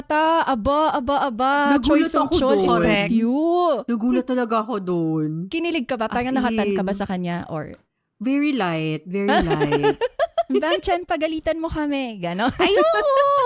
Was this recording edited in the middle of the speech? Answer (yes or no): yes